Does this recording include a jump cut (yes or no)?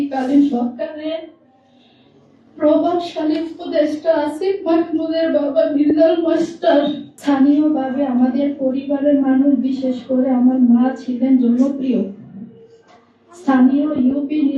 yes